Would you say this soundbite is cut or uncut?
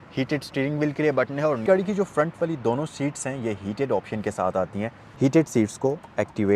cut